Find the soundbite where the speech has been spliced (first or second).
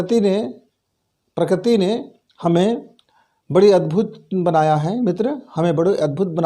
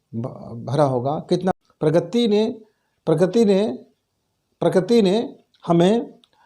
second